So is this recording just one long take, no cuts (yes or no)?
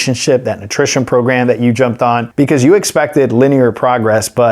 no